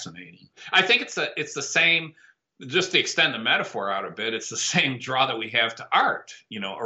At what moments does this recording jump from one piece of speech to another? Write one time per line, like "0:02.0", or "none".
none

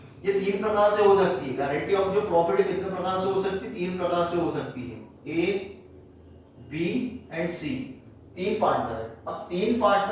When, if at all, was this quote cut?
0:05.1

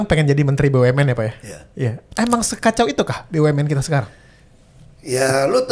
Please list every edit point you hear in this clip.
none

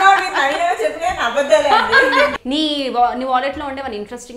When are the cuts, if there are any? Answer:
0:02.3

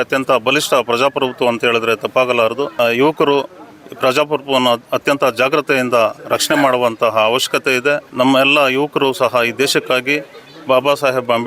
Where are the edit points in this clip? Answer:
0:02.7
0:08.1

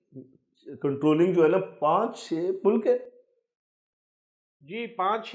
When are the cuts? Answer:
none

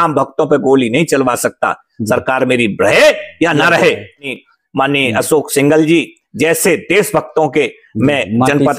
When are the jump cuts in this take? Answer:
0:04.3

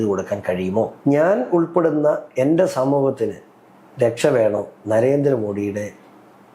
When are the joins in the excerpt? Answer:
0:01.0

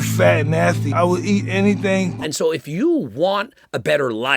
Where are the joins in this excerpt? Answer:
0:02.3

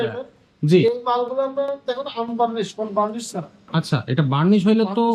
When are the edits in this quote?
none

